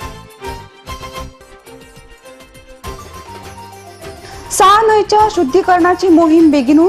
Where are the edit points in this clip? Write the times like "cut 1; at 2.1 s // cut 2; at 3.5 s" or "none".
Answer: cut 1; at 4.1 s